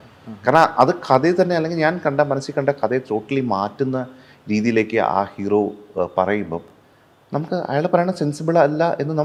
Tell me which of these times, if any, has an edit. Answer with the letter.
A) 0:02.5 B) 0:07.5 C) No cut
C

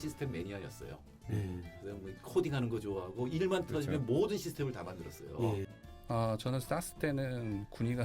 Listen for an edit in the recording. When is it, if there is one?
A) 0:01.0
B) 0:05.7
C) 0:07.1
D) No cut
B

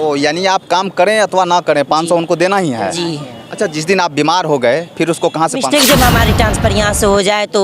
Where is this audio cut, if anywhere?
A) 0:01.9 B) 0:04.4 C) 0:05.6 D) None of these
C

